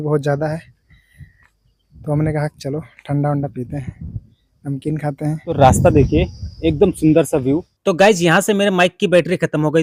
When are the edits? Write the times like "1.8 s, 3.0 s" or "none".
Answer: none